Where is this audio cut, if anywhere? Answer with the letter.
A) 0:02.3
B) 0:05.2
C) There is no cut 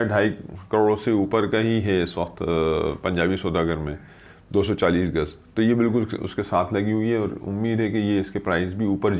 C